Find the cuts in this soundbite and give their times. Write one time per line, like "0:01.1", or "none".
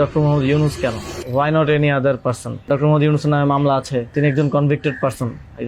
0:01.1
0:02.7
0:04.1